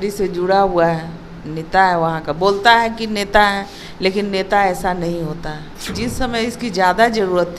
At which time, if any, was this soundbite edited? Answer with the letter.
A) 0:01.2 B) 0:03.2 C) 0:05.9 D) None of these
C